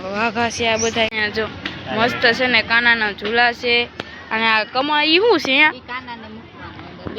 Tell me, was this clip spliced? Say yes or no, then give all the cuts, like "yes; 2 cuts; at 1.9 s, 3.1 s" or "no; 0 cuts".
yes; 1 cut; at 1.2 s